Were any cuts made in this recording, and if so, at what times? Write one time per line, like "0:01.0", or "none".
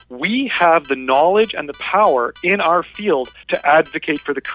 0:03.4